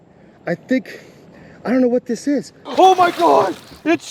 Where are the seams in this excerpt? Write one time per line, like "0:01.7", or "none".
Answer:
0:02.6